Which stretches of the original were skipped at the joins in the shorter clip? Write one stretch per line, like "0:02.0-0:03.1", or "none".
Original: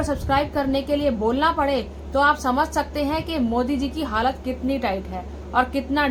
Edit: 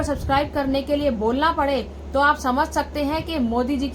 none